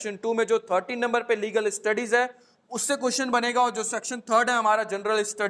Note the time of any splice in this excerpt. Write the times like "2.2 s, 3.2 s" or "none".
none